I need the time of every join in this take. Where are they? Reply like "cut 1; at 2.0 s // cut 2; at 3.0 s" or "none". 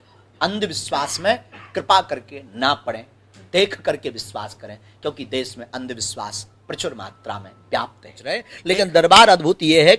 cut 1; at 8.5 s

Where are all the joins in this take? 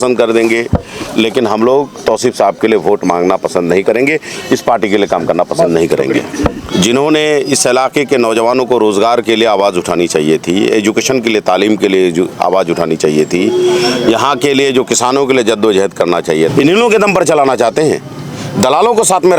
cut 1; at 6.6 s // cut 2; at 16.5 s

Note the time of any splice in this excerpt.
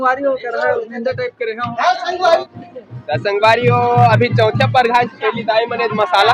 cut 1; at 2.4 s

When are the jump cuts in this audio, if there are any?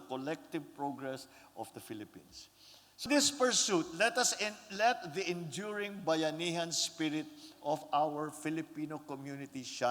cut 1; at 3.0 s

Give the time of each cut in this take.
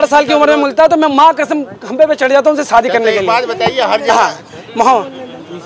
none

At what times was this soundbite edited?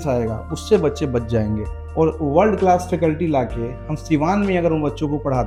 none

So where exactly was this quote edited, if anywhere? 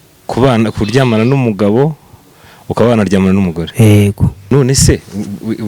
cut 1; at 4.5 s

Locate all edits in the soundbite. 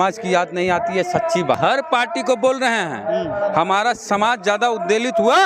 cut 1; at 1.6 s

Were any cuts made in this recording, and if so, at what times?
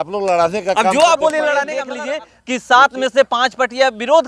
cut 1; at 1.8 s

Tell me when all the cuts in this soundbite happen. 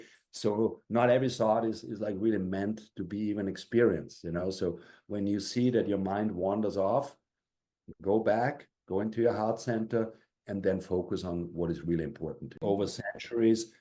cut 1; at 12.6 s

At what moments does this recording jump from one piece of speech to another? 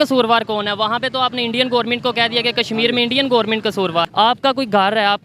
cut 1; at 4.1 s

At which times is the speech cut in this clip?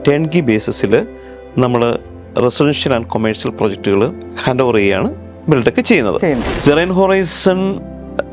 cut 1; at 4.3 s // cut 2; at 6.5 s

